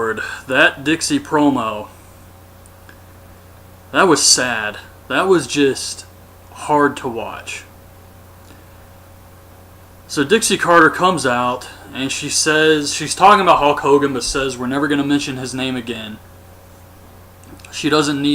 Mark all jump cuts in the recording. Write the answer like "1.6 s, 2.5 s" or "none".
10.3 s